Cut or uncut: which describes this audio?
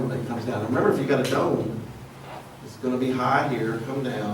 cut